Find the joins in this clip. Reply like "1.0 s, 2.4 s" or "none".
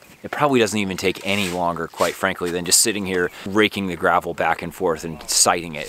3.4 s